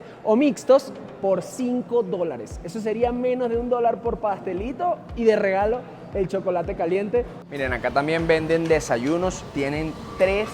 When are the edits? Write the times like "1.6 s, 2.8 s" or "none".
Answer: 7.4 s